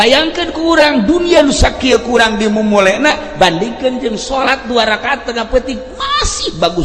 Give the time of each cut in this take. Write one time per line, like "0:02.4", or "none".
none